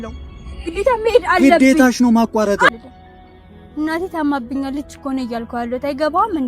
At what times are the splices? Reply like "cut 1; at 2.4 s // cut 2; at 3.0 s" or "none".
cut 1; at 2.7 s